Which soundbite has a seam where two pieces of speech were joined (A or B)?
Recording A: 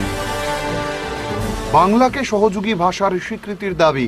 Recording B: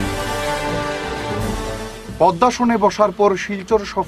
A